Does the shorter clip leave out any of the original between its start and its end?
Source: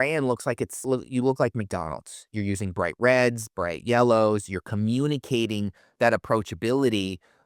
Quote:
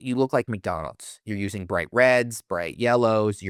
no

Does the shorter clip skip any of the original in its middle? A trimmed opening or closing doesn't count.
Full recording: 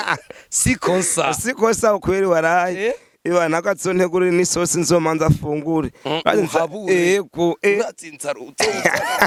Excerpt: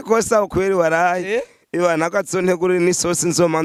no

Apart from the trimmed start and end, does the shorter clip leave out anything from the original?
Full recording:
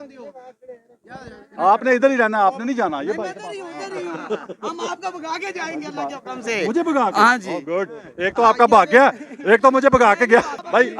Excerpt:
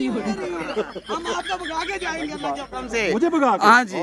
no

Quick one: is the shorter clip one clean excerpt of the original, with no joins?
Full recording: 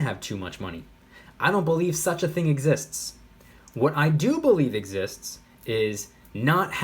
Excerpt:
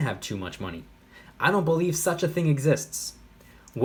yes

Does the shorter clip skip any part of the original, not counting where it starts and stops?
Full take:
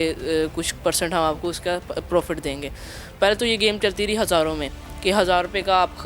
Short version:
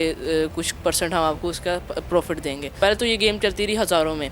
yes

